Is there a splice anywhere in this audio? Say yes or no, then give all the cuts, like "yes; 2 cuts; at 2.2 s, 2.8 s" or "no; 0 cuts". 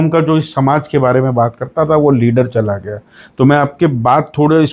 no; 0 cuts